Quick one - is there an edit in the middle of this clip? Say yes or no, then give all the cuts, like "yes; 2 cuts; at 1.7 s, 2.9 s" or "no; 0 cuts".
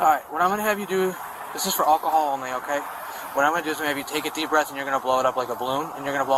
no; 0 cuts